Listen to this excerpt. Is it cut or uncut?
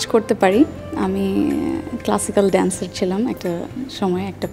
uncut